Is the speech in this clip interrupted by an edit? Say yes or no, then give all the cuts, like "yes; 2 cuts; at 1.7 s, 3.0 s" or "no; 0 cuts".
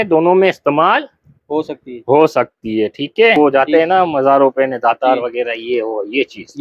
yes; 1 cut; at 3.4 s